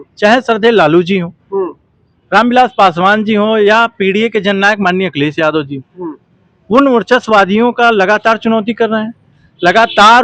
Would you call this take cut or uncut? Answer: uncut